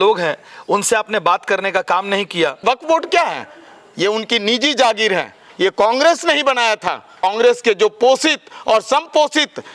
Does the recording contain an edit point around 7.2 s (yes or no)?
yes